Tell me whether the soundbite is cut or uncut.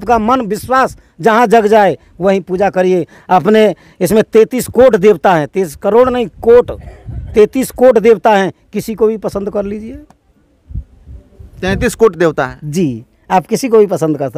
uncut